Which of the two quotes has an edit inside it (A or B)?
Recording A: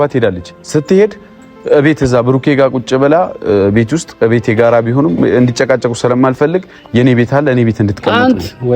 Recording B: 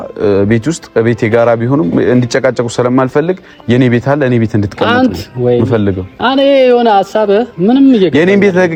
A